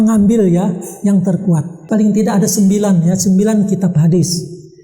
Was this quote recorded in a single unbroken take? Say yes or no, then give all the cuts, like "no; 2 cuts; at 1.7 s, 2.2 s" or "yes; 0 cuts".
no; 1 cut; at 1.8 s